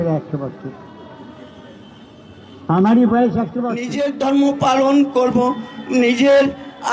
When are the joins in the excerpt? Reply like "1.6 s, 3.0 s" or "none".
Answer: 3.9 s